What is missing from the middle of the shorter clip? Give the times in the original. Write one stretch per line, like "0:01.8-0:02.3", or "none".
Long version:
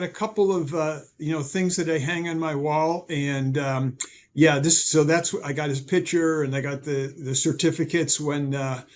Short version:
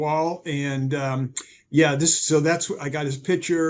none

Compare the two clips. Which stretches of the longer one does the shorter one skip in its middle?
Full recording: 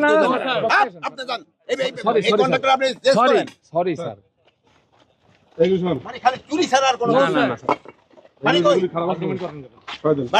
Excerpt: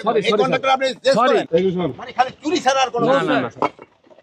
0:03.5-0:05.5

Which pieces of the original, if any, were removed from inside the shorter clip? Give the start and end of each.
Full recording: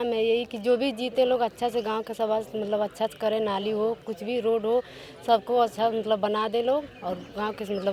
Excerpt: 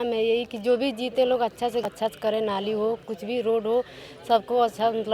0:01.9-0:02.9

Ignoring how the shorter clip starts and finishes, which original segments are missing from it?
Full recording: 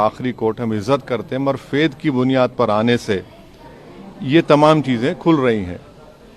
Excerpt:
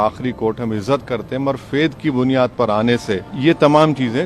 0:03.3-0:04.2

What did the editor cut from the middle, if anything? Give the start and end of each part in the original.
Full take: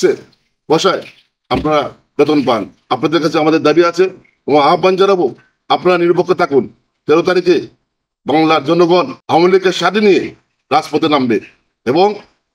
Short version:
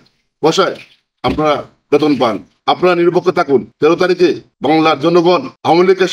0:02.7-0:05.5
0:06.7-0:07.0
0:07.7-0:08.1

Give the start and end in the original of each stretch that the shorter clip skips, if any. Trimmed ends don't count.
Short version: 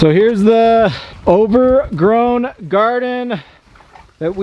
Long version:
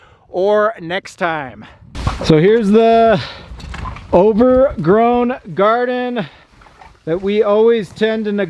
0:03.3-0:03.9

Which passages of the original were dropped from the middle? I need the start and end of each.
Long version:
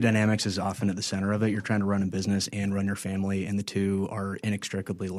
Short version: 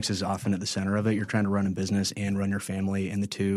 none

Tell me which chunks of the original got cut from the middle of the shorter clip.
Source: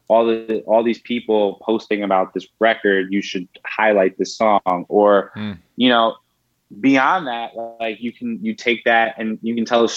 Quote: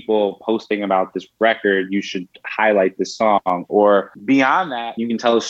0:05.8-0:09.1

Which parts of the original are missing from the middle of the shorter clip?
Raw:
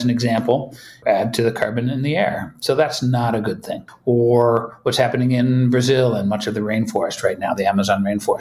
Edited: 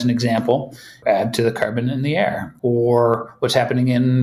0:02.5-0:03.9

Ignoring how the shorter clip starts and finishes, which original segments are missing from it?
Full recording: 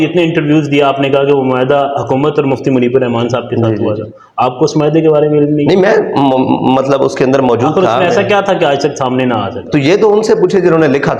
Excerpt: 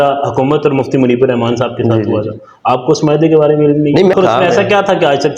0:05.9-0:07.7

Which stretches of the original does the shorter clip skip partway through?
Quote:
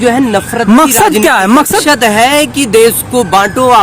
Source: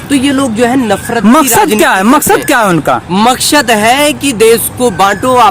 0:02.3-0:03.5

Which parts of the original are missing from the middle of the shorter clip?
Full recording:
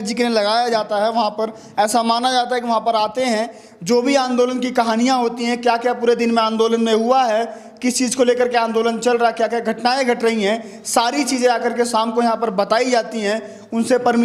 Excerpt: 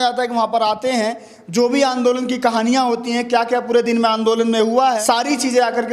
0:07.3-0:10.9

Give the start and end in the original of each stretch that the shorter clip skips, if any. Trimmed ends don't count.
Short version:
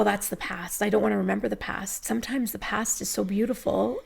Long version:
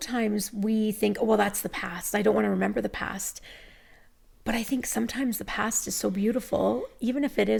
0:03.3-0:04.9

